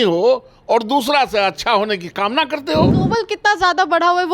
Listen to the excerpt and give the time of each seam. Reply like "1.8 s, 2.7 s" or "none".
3.0 s

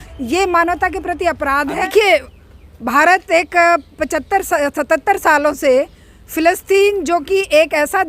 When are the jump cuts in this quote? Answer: 1.8 s

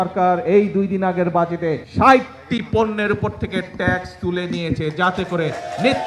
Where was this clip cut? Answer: 1.8 s

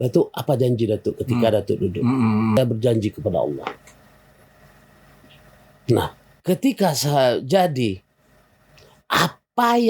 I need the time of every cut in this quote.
2.6 s

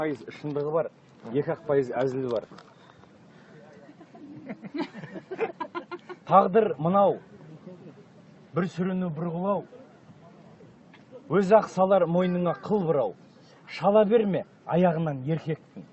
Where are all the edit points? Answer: 14.0 s

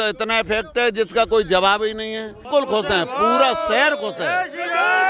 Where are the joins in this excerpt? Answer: 2.5 s

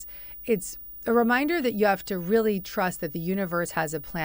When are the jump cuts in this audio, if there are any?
none

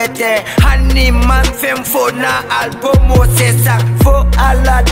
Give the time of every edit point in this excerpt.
none

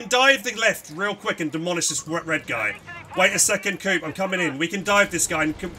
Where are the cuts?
none

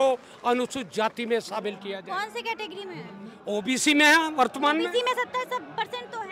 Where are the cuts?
none

